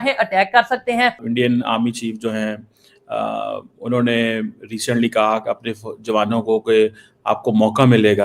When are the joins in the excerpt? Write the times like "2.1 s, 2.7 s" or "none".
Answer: 1.2 s